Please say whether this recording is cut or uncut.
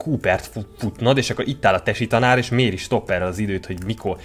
uncut